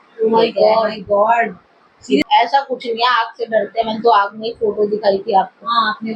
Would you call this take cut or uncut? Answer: cut